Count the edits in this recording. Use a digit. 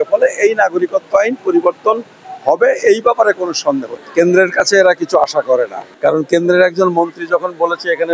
2